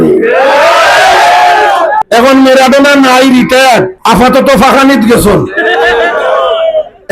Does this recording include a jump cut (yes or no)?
yes